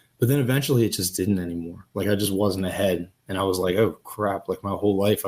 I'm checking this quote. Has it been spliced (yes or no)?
no